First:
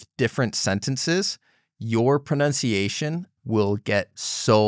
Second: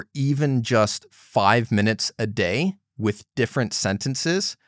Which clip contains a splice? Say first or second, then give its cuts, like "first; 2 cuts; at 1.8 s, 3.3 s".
first; 1 cut; at 3.3 s